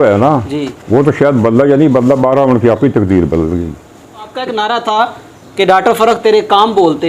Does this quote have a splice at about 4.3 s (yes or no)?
yes